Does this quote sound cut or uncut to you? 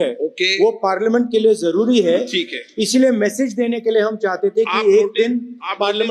uncut